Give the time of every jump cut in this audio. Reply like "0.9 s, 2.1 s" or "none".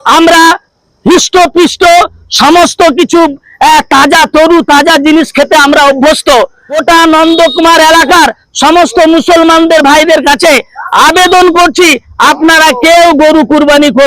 6.8 s